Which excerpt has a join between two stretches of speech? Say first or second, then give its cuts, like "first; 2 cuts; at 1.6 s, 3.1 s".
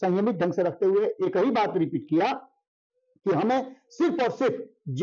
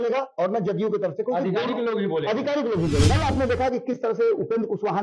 second; 1 cut; at 3.1 s